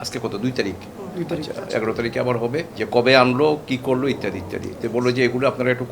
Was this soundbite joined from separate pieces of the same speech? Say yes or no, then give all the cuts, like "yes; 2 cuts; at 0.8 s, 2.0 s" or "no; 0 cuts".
yes; 1 cut; at 2.8 s